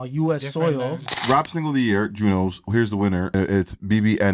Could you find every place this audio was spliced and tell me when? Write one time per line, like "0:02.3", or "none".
0:01.2
0:03.3